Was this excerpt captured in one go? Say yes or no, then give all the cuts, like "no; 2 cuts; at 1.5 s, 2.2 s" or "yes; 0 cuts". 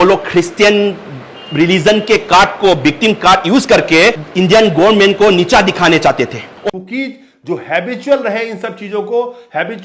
no; 1 cut; at 6.5 s